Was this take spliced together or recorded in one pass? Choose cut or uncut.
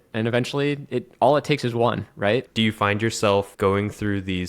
cut